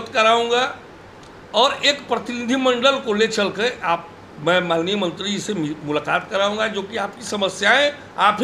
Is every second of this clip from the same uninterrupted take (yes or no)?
yes